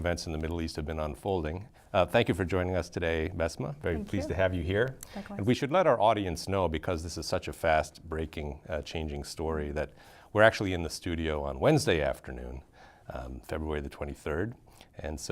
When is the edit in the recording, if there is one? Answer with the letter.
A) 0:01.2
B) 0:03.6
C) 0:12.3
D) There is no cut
A